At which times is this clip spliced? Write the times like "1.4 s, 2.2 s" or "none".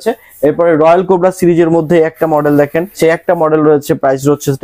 3.0 s

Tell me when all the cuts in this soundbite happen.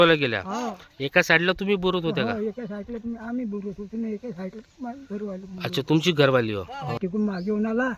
7.0 s

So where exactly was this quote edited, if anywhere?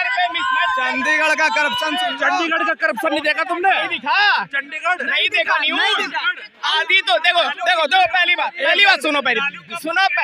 none

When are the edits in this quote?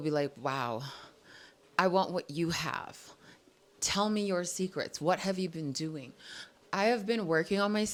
none

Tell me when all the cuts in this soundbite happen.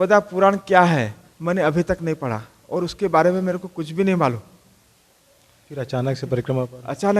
none

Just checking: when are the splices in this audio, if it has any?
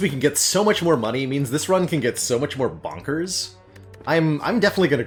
none

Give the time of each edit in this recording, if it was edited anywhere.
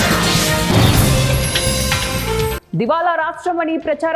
2.5 s

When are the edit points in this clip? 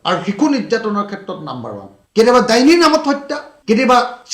1.9 s

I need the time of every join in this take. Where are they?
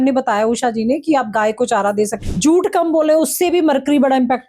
2.2 s

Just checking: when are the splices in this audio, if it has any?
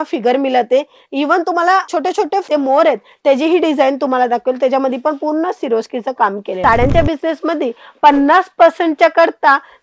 2.5 s, 6.5 s

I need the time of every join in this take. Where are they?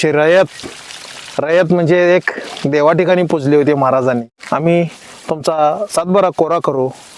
4.4 s

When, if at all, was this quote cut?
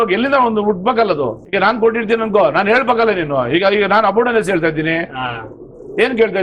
1.4 s

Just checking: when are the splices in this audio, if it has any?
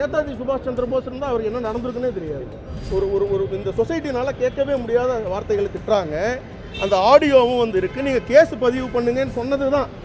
2.8 s

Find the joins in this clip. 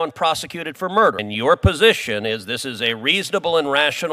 1.2 s

